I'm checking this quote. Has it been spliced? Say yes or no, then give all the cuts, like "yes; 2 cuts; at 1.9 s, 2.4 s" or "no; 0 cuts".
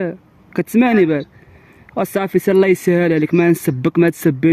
no; 0 cuts